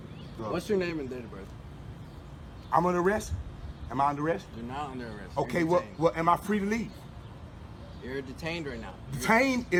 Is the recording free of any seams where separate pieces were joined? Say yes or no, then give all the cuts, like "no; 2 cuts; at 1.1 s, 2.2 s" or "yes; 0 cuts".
yes; 0 cuts